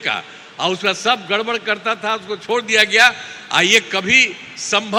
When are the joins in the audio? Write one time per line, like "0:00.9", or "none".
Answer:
none